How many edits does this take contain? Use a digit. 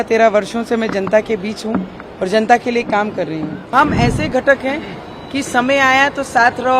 1